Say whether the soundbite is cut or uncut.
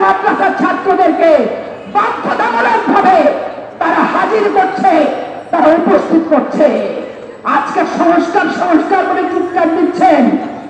uncut